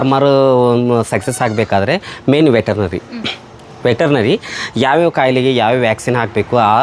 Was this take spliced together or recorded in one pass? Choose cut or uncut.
uncut